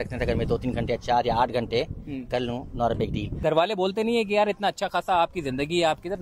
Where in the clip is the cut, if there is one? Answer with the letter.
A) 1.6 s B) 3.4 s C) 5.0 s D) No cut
B